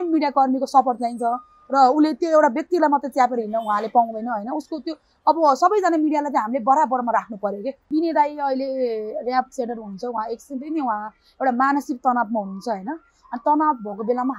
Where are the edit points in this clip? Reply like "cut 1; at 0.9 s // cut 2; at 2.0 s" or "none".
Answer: cut 1; at 7.9 s

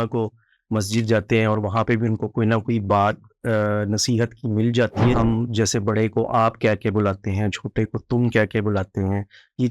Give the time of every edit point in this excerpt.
cut 1; at 5.2 s

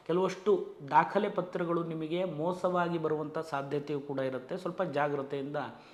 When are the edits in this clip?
none

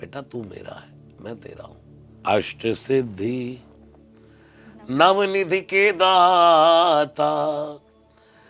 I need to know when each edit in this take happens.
cut 1; at 2.1 s

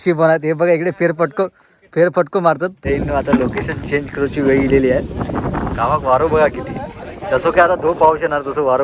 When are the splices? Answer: cut 1; at 2.8 s

